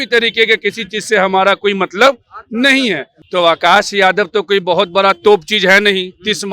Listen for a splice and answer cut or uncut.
cut